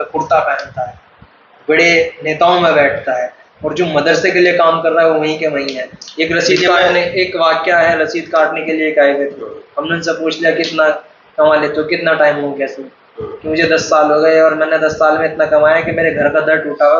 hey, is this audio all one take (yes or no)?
yes